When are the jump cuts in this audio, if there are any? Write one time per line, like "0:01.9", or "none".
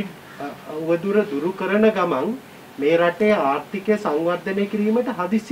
none